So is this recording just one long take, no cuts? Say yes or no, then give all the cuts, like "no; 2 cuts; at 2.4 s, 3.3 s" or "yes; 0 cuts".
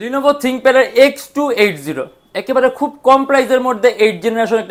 yes; 0 cuts